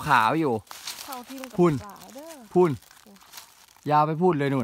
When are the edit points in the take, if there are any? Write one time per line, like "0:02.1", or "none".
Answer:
none